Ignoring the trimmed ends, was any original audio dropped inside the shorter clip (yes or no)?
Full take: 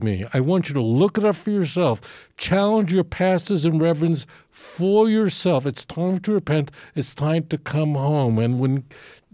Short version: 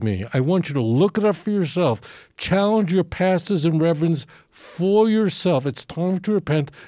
no